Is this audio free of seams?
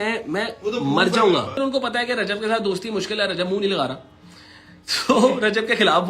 no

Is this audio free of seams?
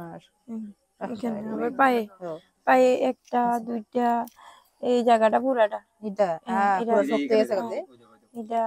yes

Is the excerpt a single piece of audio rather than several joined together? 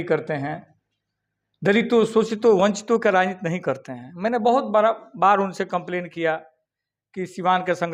yes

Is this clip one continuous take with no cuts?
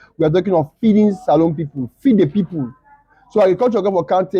yes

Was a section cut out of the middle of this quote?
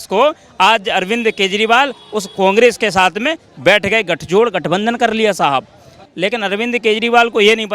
yes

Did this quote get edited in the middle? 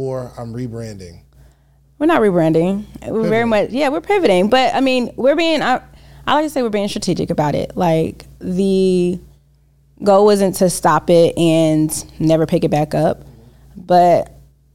no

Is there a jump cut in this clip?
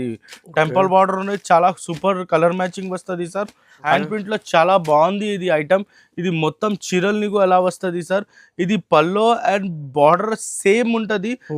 yes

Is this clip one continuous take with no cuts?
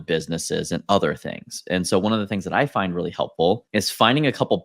no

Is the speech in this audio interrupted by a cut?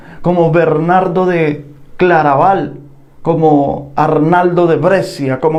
no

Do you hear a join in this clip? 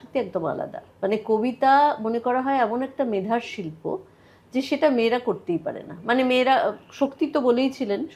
no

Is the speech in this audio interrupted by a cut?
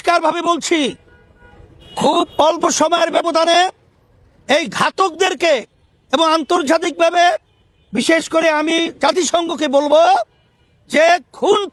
no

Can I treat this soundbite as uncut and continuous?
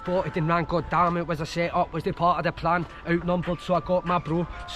yes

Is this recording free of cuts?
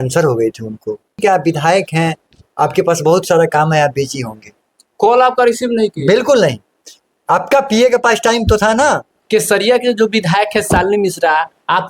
no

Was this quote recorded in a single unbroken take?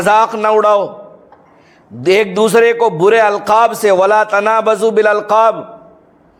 yes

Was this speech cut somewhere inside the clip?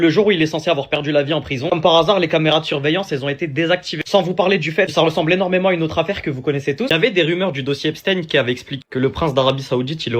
yes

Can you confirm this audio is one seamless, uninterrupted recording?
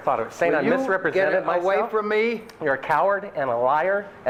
yes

